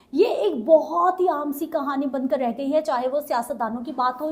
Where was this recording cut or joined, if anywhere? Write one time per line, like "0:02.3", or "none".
none